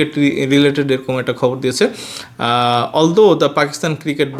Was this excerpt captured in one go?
yes; 0 cuts

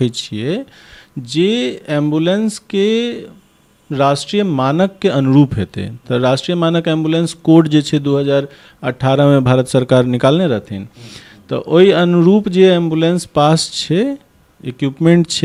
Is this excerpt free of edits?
yes; 0 cuts

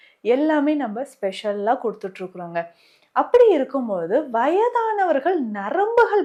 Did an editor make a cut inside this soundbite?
no; 0 cuts

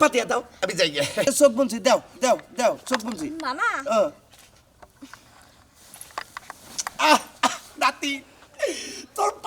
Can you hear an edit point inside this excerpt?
yes; 1 cut; at 1.2 s

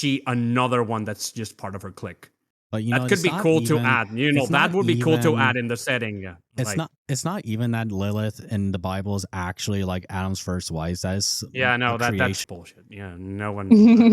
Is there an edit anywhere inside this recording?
yes; 1 cut; at 12.5 s

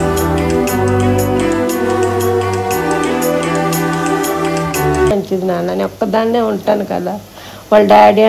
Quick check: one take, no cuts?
no; 1 cut; at 5.1 s

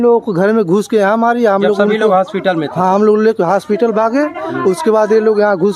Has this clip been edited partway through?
no; 0 cuts

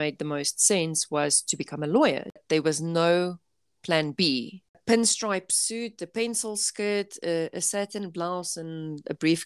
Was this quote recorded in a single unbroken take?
no; 2 cuts; at 2.4 s, 4.8 s

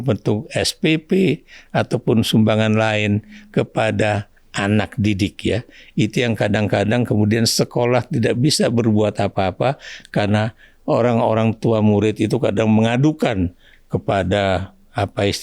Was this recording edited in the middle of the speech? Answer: no; 0 cuts

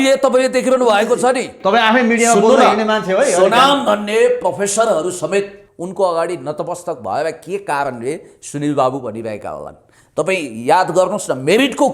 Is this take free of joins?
yes; 0 cuts

